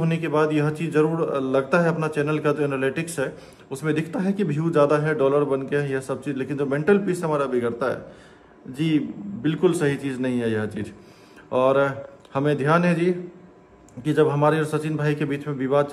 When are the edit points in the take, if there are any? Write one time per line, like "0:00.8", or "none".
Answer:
none